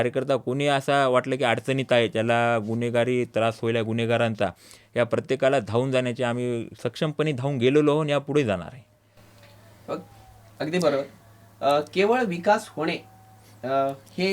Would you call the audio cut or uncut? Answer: uncut